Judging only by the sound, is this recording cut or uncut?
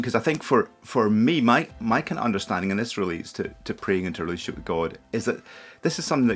cut